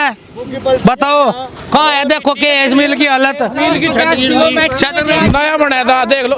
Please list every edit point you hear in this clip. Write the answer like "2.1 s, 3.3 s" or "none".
none